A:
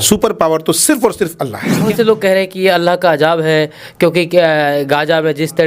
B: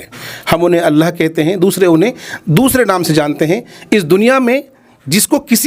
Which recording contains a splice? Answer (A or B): A